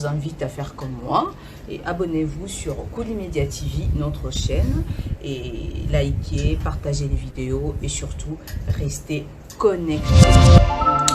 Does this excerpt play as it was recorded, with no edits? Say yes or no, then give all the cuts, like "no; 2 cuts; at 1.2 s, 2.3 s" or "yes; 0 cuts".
no; 1 cut; at 9.9 s